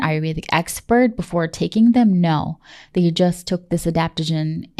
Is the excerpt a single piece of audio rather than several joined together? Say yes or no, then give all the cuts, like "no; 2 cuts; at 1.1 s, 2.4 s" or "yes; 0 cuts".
yes; 0 cuts